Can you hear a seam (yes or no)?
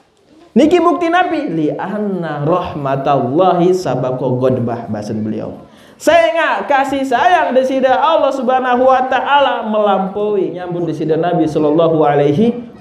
yes